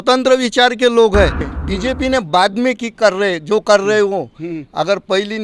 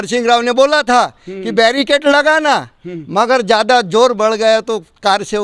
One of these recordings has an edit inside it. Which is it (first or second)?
first